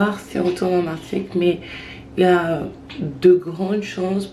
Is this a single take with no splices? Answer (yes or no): yes